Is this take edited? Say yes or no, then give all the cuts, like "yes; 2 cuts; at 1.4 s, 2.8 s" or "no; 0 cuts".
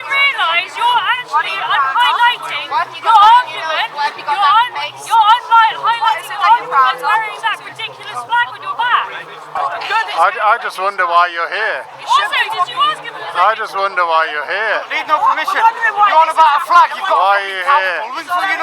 yes; 1 cut; at 9.5 s